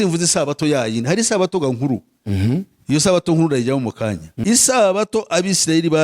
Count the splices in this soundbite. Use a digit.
1